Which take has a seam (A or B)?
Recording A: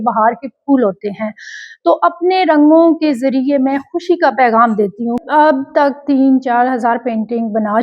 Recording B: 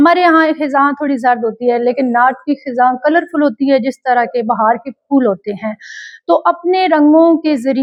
A